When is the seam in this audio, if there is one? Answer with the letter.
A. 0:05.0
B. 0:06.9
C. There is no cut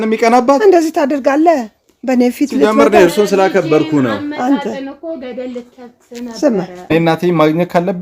B